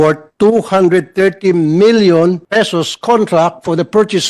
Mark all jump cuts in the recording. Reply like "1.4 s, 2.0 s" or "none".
2.4 s